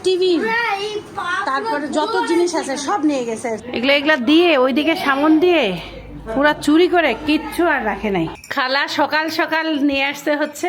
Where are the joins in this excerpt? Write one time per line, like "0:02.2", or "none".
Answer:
0:03.6
0:08.4